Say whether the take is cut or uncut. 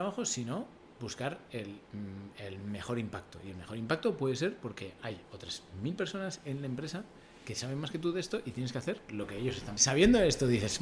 cut